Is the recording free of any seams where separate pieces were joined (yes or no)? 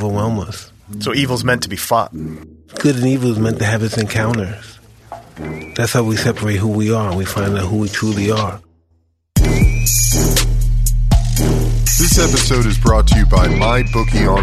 no